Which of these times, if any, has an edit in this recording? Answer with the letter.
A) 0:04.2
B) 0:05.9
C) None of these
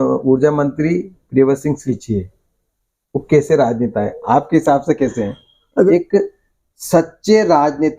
B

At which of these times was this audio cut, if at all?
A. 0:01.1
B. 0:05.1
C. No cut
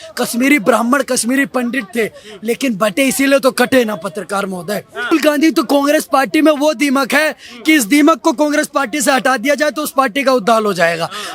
B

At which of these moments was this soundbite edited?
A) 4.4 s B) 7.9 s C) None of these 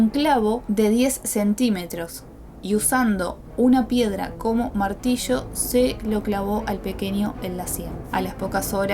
B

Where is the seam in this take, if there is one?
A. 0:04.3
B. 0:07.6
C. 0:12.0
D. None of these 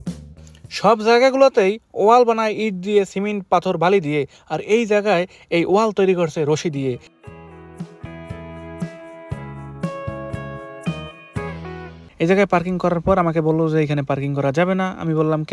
C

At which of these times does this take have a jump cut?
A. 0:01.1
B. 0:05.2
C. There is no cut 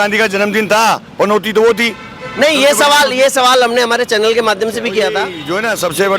B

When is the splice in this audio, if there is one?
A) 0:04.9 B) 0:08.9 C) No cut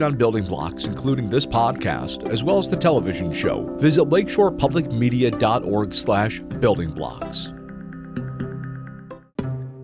B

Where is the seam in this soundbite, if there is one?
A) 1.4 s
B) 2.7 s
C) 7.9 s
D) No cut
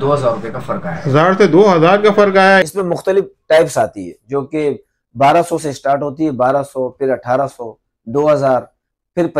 B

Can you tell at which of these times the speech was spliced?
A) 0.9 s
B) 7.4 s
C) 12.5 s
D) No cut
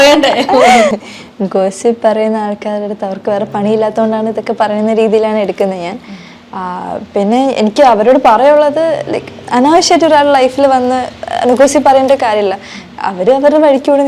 A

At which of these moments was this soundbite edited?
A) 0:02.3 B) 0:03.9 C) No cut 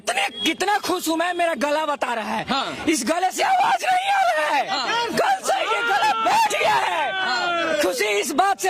C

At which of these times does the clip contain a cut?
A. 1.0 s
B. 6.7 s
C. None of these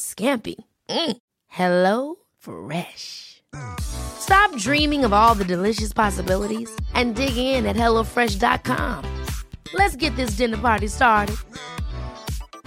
C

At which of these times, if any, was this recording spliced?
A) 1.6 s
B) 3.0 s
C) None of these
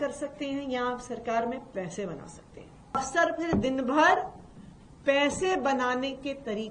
B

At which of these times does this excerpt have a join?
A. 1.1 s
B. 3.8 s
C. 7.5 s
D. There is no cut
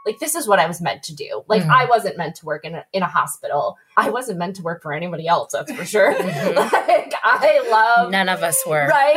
B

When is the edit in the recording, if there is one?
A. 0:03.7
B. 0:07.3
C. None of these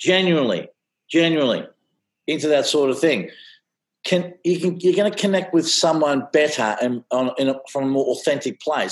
C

